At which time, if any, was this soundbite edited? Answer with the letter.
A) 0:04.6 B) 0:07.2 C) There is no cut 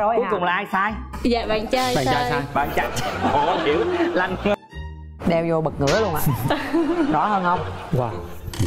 A